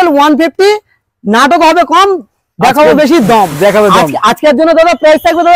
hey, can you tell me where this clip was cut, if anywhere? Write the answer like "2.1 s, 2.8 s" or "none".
none